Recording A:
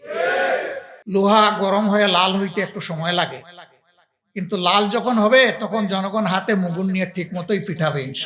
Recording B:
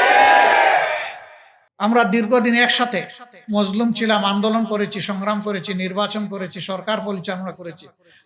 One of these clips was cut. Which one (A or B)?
A